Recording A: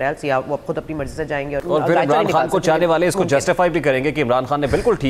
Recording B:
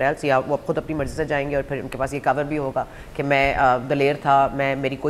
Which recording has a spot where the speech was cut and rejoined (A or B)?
A